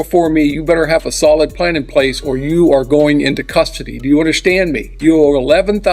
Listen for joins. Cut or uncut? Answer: cut